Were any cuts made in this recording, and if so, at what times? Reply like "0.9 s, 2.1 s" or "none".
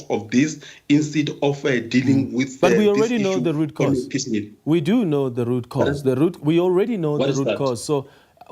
none